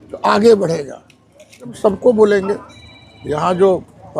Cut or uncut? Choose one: cut